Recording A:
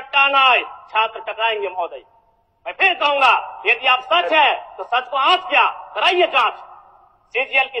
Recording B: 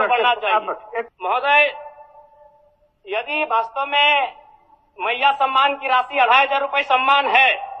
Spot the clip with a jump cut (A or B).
B